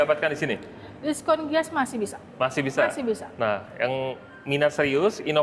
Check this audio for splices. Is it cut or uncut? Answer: uncut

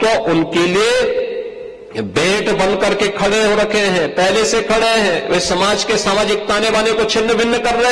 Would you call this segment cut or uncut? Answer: uncut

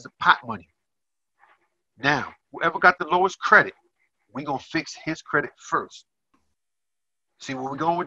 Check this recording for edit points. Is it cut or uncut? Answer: cut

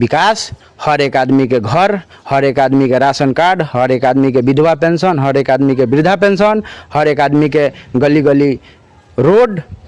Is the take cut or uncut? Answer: uncut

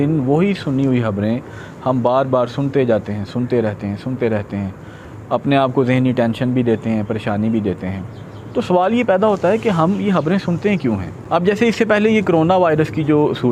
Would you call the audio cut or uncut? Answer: uncut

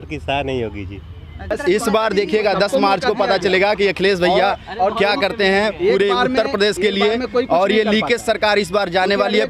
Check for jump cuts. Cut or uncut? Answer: cut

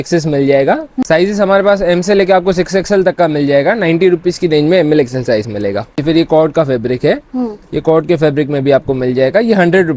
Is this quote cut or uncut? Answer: cut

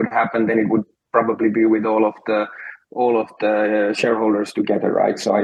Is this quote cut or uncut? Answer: uncut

